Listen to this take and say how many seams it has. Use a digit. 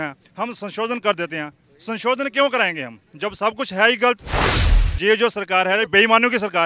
1